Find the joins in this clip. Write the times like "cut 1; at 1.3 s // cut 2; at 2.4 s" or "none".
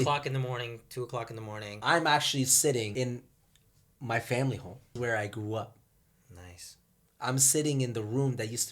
cut 1; at 1.7 s // cut 2; at 2.9 s // cut 3; at 4.9 s